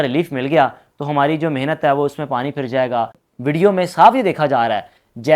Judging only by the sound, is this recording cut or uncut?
cut